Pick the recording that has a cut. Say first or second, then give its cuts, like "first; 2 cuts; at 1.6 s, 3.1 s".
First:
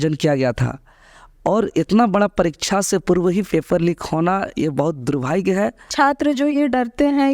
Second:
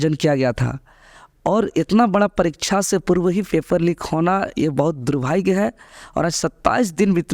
first; 1 cut; at 5.9 s